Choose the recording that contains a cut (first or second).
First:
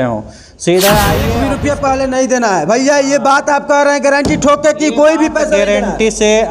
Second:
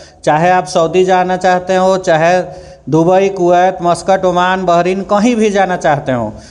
first